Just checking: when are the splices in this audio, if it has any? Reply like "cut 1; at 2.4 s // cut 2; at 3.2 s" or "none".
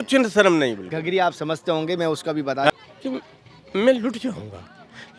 cut 1; at 2.7 s